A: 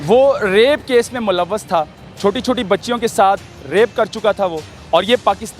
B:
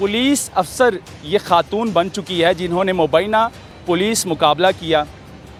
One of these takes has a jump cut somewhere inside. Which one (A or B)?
A